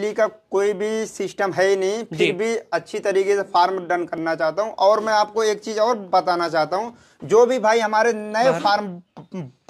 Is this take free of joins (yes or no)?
yes